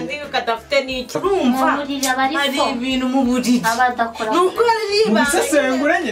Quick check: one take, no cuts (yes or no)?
no